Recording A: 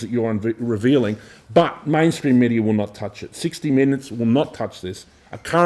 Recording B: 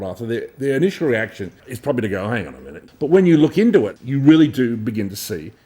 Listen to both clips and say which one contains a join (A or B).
B